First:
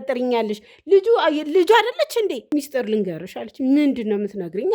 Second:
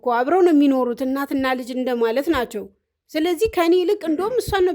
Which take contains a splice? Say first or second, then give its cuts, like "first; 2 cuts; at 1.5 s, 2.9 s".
first; 1 cut; at 2.4 s